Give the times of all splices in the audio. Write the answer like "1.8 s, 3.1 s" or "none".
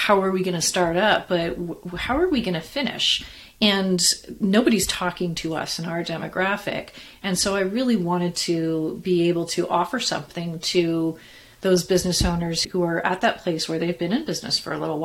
none